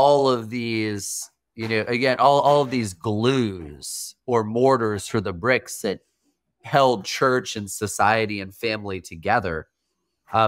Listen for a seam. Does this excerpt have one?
no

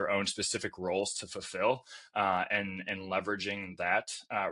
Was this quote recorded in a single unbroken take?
yes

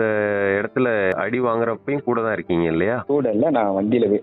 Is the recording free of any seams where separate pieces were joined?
no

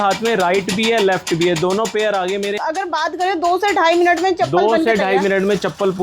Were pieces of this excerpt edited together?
yes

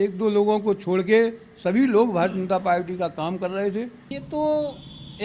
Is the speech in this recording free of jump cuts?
no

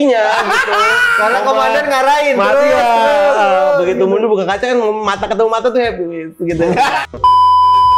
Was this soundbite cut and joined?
no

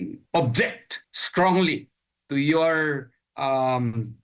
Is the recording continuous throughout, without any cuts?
yes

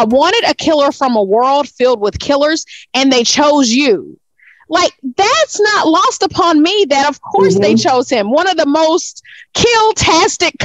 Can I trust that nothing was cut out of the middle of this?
yes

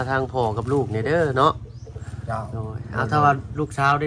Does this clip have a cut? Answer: no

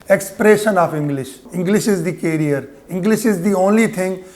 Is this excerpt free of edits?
no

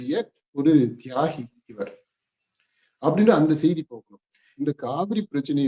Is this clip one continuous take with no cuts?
no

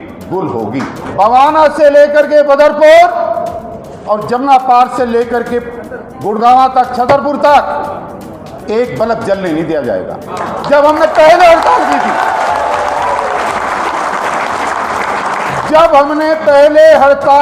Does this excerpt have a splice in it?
yes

